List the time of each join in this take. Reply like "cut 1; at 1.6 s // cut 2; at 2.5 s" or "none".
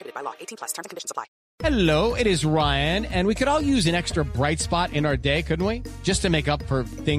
cut 1; at 1.4 s